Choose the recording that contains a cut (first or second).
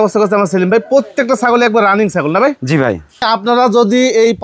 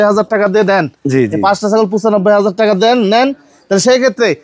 first